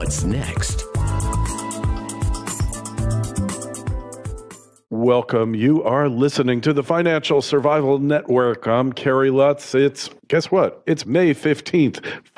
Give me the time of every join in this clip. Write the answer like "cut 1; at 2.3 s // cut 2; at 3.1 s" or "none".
cut 1; at 2.6 s